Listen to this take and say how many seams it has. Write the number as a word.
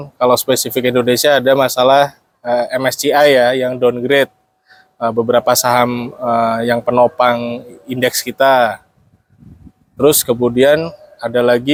zero